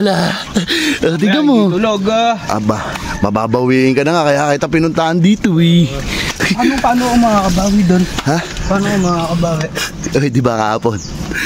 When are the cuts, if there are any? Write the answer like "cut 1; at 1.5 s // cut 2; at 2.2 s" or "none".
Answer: none